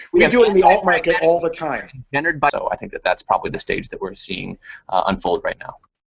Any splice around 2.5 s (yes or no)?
yes